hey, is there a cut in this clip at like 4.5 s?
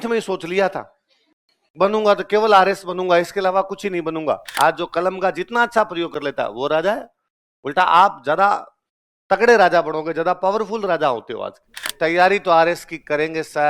yes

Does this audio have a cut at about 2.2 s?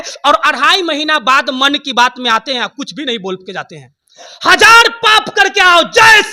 no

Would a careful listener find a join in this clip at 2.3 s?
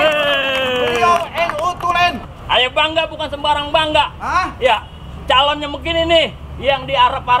yes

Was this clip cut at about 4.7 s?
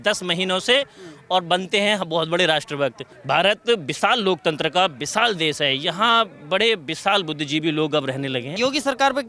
no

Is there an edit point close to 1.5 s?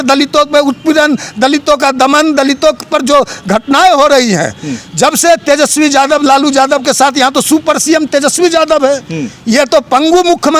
no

